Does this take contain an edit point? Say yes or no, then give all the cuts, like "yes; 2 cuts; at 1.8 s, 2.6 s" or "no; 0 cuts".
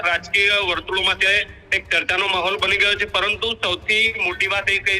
no; 0 cuts